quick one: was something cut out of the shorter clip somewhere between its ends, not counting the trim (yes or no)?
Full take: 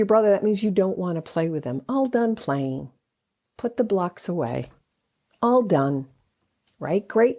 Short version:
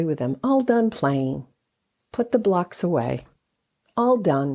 no